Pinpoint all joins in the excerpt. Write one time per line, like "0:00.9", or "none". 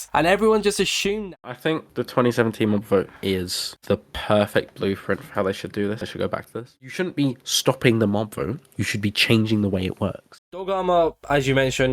0:01.2
0:06.7
0:10.3